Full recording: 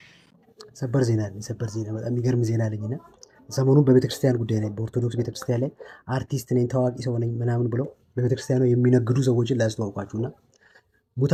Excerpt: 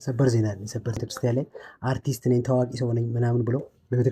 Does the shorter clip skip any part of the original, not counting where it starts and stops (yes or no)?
yes